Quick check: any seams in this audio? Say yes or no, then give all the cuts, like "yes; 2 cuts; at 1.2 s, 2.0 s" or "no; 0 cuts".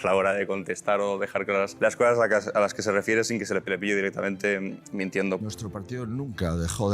yes; 3 cuts; at 1.7 s, 3.6 s, 5.4 s